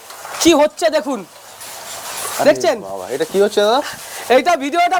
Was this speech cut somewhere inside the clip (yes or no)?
no